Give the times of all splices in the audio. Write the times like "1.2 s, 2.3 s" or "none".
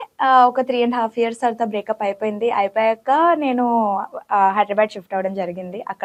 none